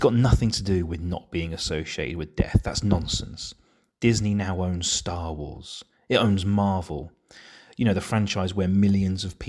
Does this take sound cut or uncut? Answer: uncut